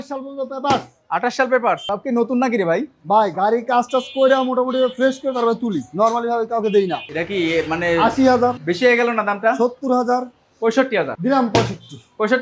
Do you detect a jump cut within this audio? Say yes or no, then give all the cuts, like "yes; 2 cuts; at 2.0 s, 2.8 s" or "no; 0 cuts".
yes; 3 cuts; at 7.0 s, 8.6 s, 11.1 s